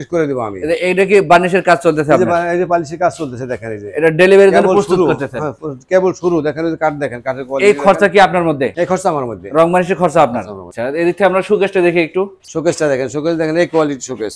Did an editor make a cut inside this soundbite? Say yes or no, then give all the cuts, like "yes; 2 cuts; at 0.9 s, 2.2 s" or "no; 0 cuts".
no; 0 cuts